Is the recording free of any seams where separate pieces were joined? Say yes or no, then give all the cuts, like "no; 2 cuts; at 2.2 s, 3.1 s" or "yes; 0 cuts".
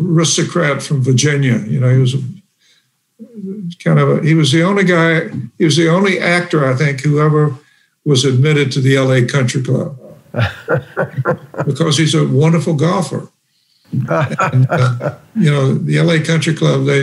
yes; 0 cuts